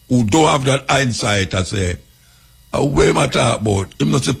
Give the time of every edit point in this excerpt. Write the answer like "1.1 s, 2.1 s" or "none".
none